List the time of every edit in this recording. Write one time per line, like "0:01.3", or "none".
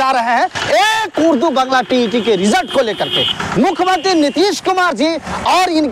none